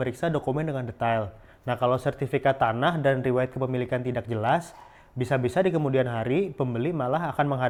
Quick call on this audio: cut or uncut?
uncut